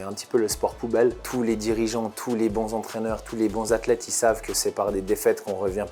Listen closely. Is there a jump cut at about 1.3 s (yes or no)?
yes